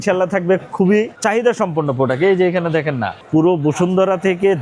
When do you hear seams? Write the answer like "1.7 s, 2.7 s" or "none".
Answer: 1.1 s, 3.1 s